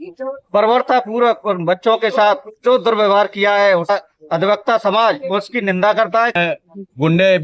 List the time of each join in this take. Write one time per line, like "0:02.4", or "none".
0:03.9
0:06.3